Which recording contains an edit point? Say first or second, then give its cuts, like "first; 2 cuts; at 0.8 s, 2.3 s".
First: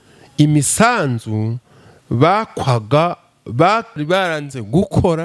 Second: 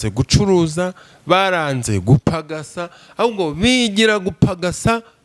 first; 1 cut; at 3.9 s